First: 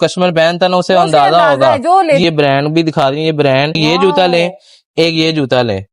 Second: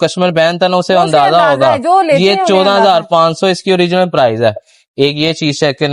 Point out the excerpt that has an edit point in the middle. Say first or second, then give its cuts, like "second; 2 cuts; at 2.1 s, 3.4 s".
first; 2 cuts; at 2.2 s, 3.8 s